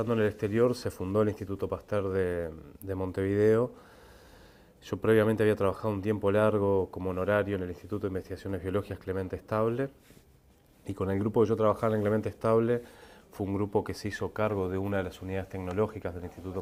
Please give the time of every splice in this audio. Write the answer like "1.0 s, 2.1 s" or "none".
none